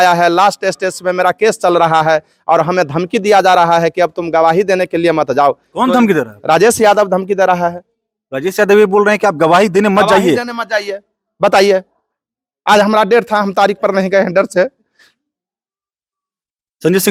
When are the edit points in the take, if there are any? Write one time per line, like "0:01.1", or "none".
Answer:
none